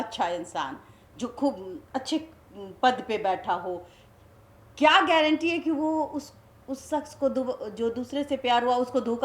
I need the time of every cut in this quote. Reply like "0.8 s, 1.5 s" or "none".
none